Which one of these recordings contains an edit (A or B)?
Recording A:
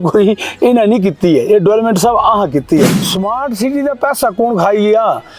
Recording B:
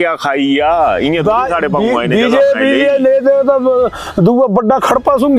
A